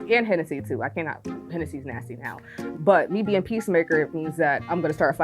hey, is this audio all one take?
no; 1 cut; at 2.6 s

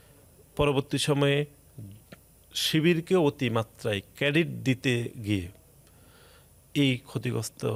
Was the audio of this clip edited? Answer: no; 0 cuts

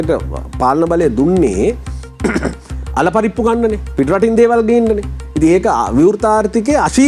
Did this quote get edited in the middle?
no; 0 cuts

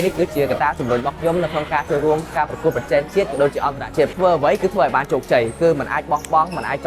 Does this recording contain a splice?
yes; 2 cuts; at 2.3 s, 4.1 s

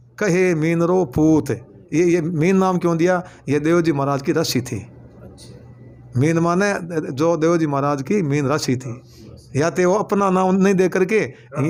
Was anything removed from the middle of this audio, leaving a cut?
no; 0 cuts

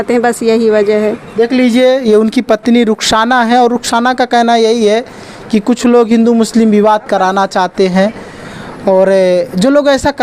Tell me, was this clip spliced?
no; 0 cuts

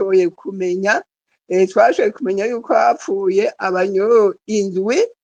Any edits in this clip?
no; 0 cuts

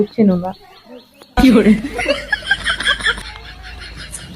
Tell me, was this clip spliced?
yes; 1 cut; at 3.2 s

